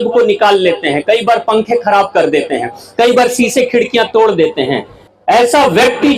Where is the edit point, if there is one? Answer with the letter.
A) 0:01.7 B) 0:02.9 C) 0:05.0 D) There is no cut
C